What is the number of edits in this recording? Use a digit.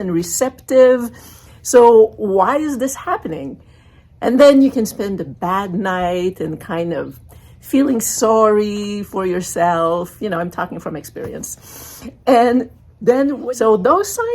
1